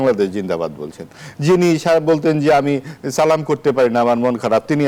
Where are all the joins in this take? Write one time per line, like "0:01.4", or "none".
none